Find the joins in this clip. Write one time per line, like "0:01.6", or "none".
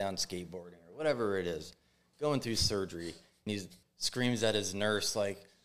0:03.5